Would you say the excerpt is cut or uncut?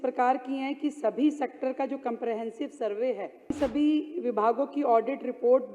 cut